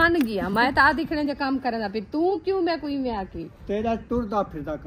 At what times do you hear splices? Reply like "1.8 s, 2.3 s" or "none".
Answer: 2.3 s